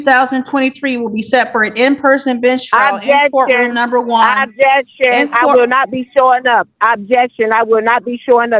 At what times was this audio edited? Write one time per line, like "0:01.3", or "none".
none